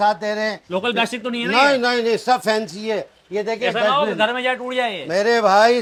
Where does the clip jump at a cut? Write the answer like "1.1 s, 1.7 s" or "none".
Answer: none